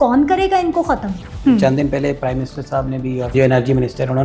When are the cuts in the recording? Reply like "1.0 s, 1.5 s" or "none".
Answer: 1.3 s, 3.3 s